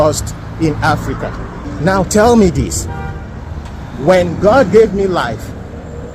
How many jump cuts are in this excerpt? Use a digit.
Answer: 1